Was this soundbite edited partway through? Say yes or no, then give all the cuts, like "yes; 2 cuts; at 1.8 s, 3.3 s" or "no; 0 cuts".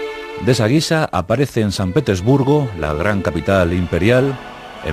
no; 0 cuts